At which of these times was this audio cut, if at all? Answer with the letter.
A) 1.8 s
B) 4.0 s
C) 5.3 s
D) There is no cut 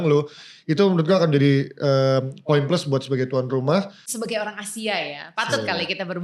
B